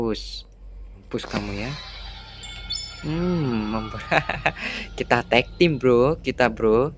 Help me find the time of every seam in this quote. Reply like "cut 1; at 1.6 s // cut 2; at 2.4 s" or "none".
cut 1; at 1.0 s